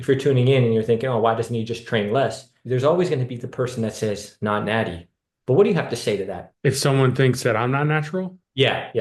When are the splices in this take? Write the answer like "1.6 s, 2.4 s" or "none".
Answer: 2.5 s, 6.4 s